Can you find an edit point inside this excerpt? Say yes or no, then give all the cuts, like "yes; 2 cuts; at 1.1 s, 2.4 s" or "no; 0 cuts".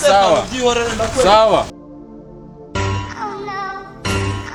yes; 1 cut; at 1.8 s